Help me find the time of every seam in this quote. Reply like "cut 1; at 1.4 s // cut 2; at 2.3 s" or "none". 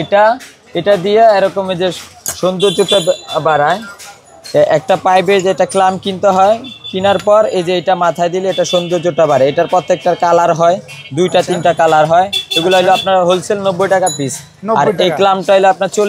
none